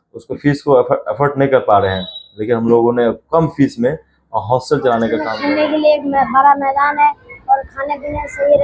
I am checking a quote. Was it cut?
yes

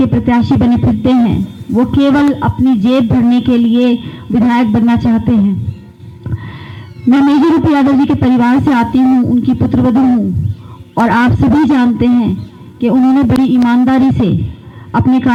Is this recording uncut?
yes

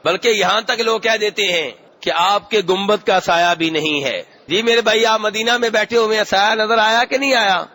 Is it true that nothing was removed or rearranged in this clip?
no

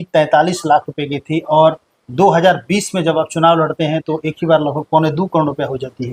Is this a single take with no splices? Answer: yes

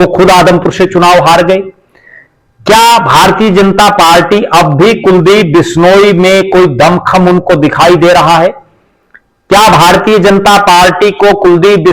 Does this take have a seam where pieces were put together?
no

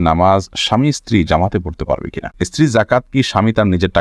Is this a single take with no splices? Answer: no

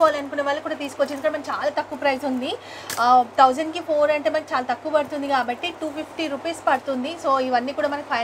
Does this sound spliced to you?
no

